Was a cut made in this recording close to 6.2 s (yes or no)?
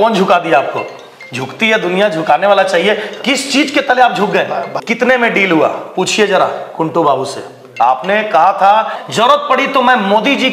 no